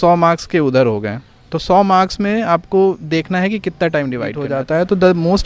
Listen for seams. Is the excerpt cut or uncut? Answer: cut